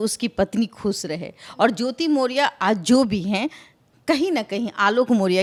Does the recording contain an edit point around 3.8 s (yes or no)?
no